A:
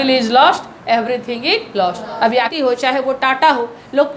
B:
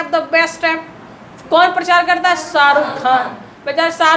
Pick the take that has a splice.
A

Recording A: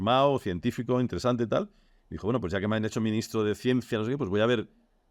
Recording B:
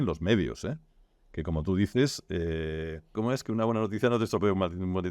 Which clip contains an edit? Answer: B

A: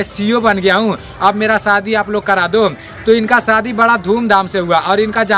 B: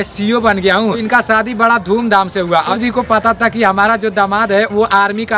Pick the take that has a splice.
B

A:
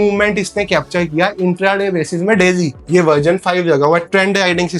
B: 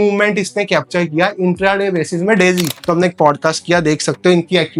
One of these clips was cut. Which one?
B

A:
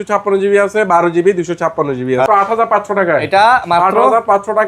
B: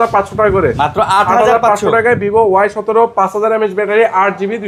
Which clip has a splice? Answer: A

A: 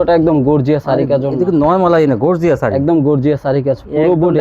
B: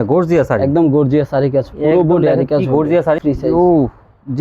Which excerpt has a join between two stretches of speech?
B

